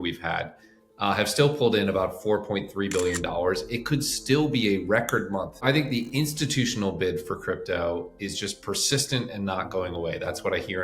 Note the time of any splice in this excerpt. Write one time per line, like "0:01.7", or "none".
0:05.6